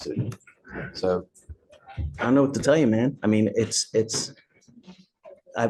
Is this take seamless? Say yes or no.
yes